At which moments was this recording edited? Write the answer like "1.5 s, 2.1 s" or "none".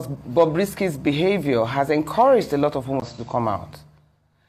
3.1 s